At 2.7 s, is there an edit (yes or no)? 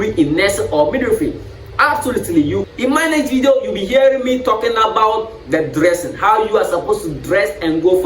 yes